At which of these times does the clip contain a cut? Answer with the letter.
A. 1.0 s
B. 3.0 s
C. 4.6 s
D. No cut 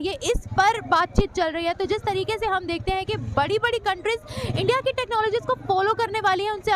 D